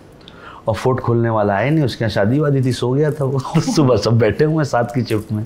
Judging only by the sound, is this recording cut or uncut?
uncut